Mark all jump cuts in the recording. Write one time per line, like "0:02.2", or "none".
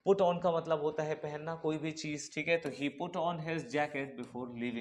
none